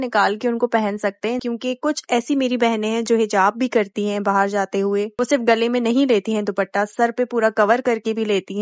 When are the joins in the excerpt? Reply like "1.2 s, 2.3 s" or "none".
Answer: 1.4 s

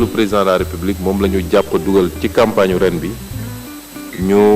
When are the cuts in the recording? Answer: none

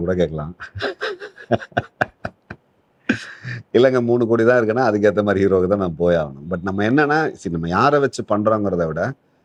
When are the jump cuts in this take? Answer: none

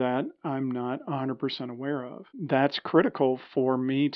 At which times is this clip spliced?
2.4 s

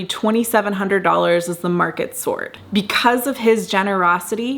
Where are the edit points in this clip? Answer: none

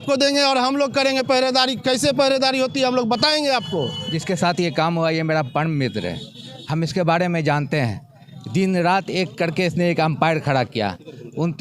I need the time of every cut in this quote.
4.1 s

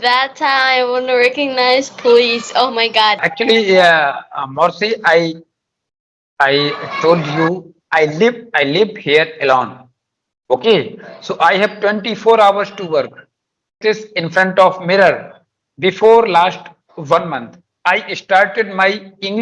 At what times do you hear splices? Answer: 3.3 s, 13.8 s

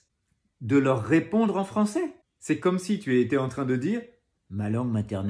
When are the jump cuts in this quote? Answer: 2.3 s

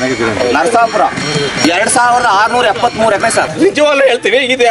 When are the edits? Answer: 1.6 s, 3.5 s

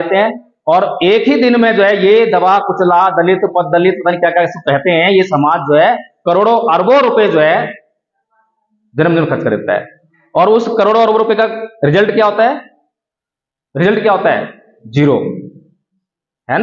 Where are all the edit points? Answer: none

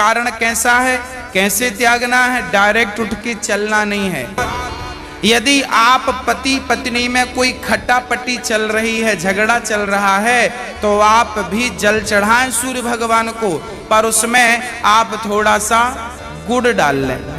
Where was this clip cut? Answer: 4.3 s

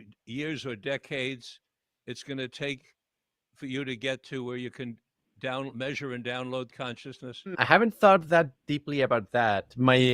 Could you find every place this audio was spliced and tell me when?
7.5 s

